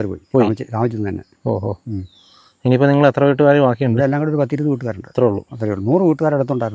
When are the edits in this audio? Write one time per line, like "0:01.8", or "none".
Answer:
none